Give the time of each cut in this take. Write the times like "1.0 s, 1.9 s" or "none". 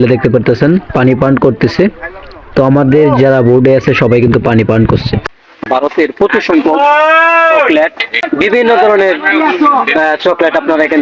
5.2 s, 8.3 s